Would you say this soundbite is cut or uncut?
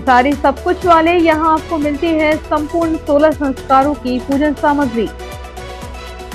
uncut